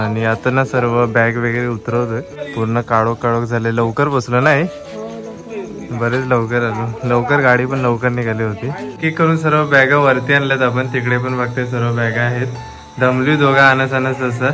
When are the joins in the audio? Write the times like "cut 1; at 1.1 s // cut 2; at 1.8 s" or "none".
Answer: cut 1; at 2.4 s // cut 2; at 9.0 s